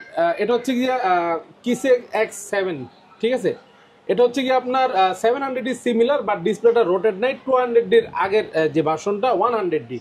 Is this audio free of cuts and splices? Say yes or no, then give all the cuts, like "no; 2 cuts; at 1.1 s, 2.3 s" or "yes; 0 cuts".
yes; 0 cuts